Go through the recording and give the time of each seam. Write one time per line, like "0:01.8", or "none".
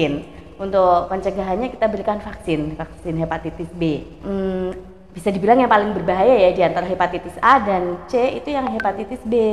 0:04.1

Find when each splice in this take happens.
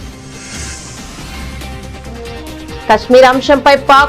0:01.6

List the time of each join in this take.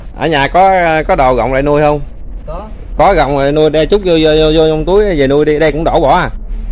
none

